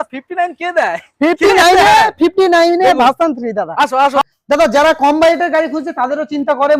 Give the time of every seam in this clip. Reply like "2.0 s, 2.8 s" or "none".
4.2 s